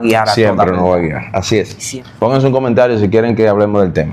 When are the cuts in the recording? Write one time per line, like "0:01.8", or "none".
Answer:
0:01.8